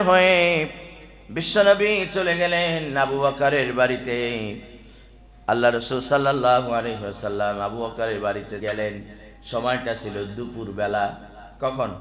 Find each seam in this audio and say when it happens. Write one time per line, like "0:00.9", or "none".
0:08.6